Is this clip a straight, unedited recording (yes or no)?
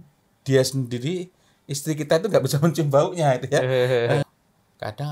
no